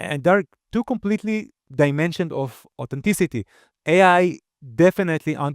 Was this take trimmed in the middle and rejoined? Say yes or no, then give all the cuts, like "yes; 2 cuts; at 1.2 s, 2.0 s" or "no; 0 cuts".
yes; 1 cut; at 3.7 s